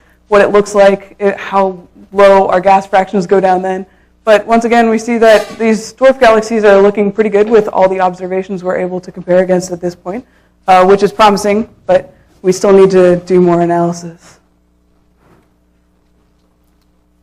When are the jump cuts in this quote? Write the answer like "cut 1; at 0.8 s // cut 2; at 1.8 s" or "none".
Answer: cut 1; at 9.9 s